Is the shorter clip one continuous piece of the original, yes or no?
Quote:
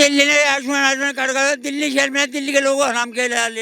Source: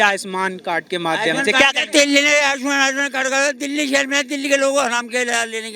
yes